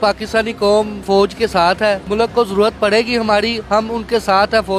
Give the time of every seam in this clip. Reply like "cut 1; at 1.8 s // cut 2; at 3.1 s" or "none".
cut 1; at 1.0 s // cut 2; at 2.0 s